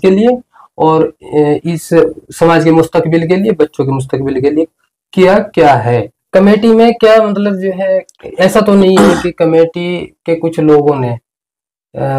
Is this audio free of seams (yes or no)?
no